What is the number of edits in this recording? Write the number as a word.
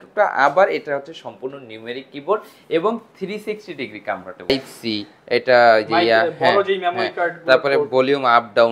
one